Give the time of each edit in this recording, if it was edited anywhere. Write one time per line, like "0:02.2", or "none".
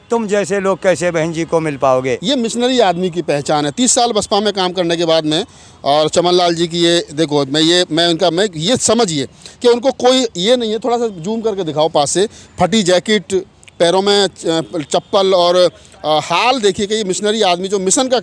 0:02.2